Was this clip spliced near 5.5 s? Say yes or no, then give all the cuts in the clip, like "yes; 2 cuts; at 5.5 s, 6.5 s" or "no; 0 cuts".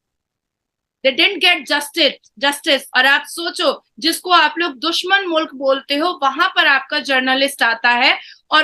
no; 1 cut; at 2.9 s